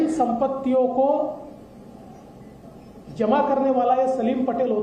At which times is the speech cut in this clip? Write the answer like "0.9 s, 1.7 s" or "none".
none